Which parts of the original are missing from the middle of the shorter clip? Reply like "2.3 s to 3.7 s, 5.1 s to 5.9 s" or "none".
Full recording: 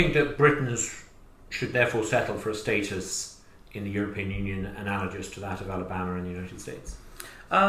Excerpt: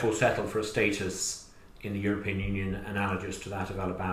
none